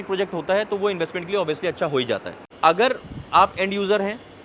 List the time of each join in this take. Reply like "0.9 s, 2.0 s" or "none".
2.5 s